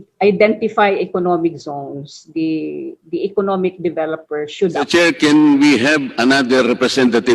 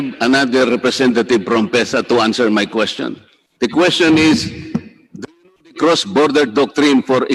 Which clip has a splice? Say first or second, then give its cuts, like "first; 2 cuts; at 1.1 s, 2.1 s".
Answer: first; 1 cut; at 4.9 s